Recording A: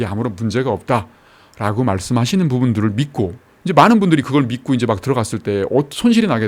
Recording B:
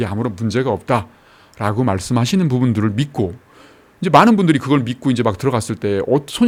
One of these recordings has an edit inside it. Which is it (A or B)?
A